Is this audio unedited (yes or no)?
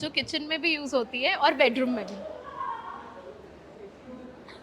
yes